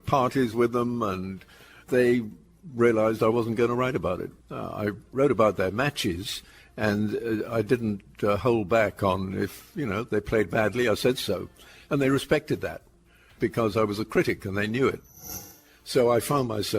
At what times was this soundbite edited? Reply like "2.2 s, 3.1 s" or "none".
4.9 s, 15.2 s